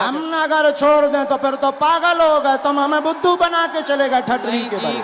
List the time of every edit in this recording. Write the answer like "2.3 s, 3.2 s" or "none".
none